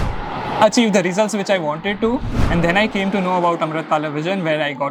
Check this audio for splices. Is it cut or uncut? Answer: uncut